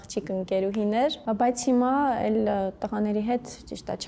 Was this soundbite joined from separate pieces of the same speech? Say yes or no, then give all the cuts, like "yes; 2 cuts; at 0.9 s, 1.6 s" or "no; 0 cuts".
no; 0 cuts